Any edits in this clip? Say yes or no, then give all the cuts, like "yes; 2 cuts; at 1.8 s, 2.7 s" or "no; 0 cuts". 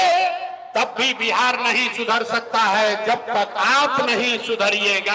no; 0 cuts